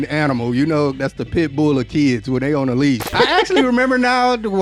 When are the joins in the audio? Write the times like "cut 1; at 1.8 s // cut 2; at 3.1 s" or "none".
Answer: cut 1; at 3.1 s